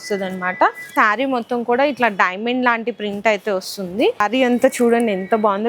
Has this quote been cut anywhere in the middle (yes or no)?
yes